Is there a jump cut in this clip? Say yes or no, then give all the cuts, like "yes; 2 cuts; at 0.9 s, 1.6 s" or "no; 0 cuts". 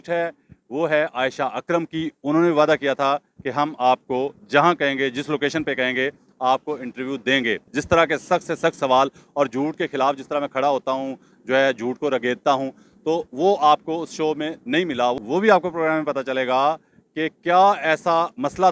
yes; 2 cuts; at 7.7 s, 15.1 s